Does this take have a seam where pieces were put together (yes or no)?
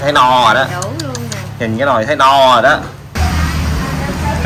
yes